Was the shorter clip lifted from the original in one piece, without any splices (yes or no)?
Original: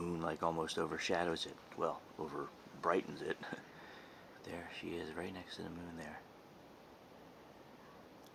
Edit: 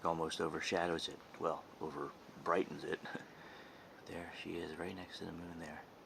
yes